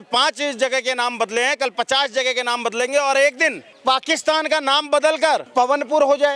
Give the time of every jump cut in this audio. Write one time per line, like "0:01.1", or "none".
0:03.7
0:05.5

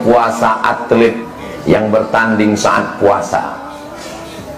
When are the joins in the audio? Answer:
0:01.2

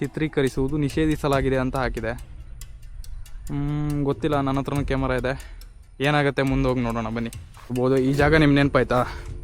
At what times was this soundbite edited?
0:07.7

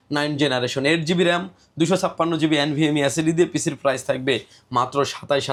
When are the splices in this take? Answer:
none

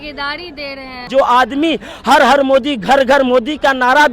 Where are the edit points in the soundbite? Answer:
0:01.0

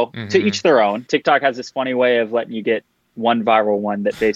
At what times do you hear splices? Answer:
0:01.0

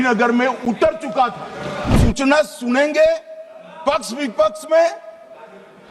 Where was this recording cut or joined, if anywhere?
0:01.9

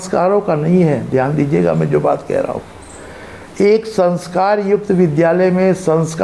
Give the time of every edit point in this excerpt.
none

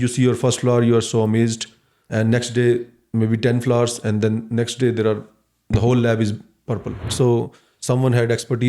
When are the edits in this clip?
0:07.1

